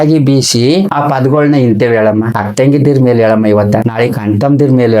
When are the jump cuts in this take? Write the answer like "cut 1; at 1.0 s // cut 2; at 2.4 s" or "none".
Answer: cut 1; at 0.9 s // cut 2; at 2.4 s // cut 3; at 3.9 s